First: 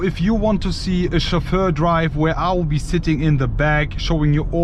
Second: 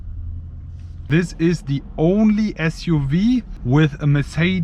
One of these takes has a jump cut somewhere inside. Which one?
second; 2 cuts; at 1.1 s, 3.6 s

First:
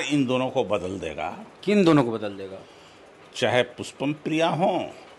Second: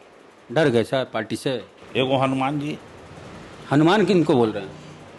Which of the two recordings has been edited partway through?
second; 1 cut; at 1.8 s

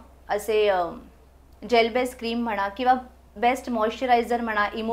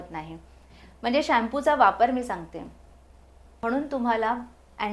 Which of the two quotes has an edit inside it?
second; 1 cut; at 3.5 s

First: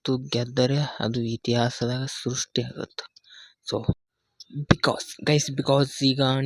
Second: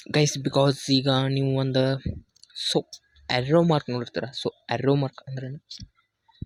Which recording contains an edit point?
first; 1 cut; at 4.0 s

